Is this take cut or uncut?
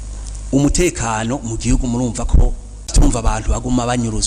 cut